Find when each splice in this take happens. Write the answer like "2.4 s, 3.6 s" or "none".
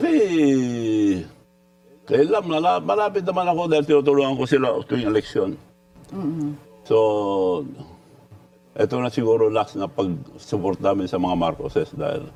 none